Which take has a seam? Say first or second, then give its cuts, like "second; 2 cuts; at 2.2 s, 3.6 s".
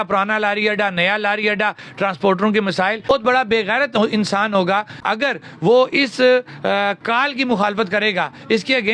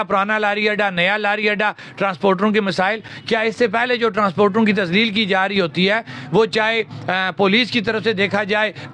first; 2 cuts; at 3.1 s, 5.0 s